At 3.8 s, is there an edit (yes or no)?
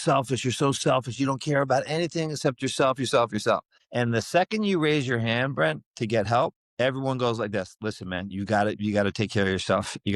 yes